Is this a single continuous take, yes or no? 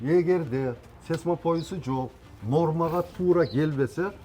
yes